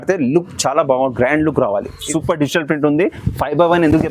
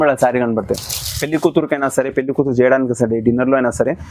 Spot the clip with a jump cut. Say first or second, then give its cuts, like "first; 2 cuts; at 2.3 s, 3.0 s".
first; 1 cut; at 2.0 s